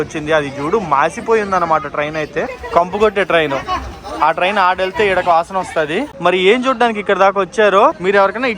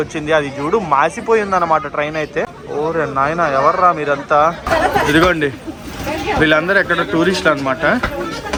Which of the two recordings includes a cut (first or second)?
first